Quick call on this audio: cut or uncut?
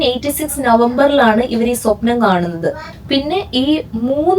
cut